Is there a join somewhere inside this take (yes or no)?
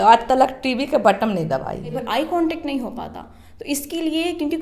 yes